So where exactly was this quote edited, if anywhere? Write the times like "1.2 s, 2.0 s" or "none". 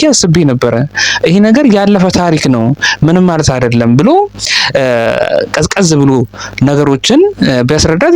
none

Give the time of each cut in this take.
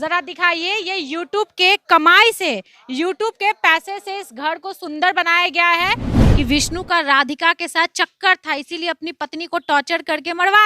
6.2 s

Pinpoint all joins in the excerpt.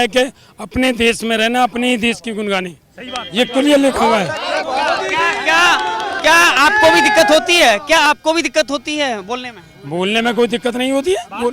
none

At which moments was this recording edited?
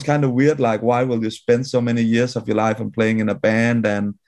none

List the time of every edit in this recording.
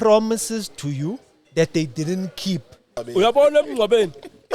3.0 s

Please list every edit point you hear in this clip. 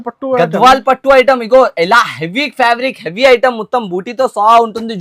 none

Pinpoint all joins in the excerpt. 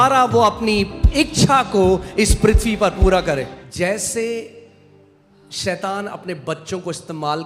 3.6 s

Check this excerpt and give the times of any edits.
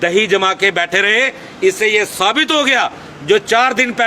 none

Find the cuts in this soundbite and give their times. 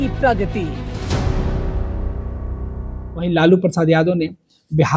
none

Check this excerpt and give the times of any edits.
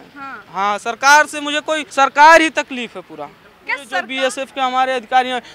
1.9 s, 3.9 s

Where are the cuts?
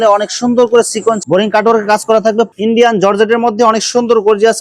2.5 s

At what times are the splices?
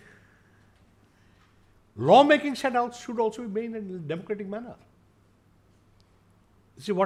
none

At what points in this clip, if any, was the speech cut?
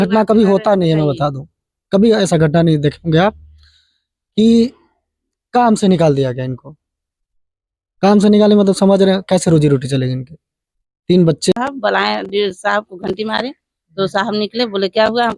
11.5 s

